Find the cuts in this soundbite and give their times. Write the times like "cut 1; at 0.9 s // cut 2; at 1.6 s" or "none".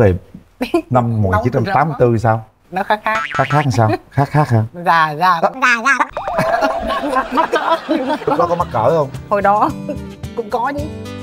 none